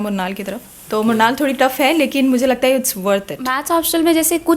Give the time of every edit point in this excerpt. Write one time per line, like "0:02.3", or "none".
0:03.6